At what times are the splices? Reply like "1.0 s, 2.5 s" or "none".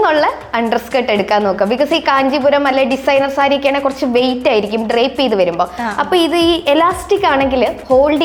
none